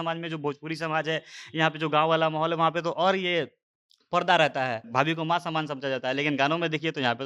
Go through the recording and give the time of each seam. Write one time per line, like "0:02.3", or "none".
0:04.9

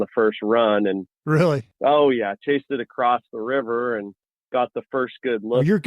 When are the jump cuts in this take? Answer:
0:01.7

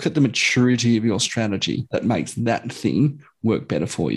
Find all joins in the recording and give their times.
0:01.8

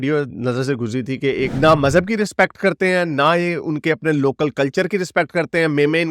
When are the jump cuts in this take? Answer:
0:01.5

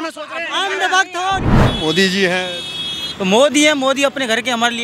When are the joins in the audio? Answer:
0:01.4

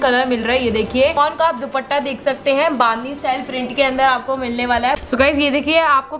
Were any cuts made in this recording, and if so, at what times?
0:01.2
0:05.0

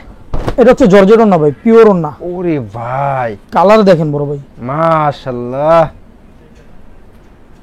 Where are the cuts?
none

